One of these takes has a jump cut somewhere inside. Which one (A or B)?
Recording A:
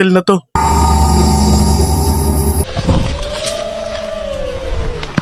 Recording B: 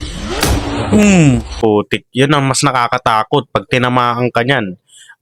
A